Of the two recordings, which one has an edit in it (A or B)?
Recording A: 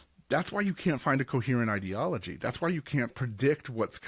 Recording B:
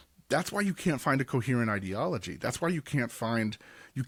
A